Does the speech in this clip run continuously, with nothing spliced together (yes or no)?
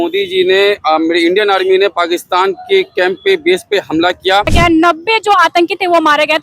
no